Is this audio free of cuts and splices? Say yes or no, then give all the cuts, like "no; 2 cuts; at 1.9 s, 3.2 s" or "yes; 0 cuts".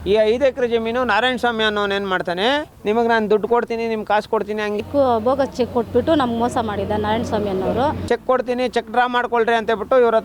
no; 3 cuts; at 2.7 s, 4.8 s, 8.0 s